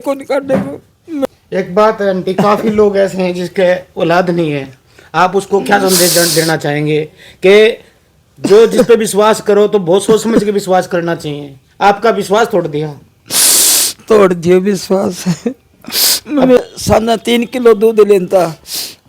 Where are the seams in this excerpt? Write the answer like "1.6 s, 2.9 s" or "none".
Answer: 1.2 s, 16.6 s